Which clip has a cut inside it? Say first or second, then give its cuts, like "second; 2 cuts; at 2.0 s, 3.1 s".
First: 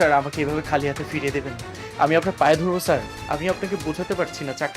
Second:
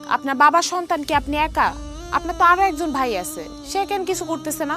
first; 1 cut; at 3.1 s